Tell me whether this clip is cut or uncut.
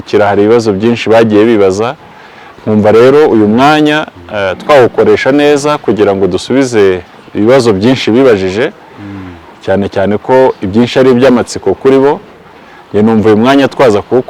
uncut